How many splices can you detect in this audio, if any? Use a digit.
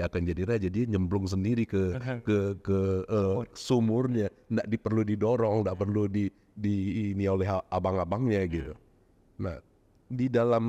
0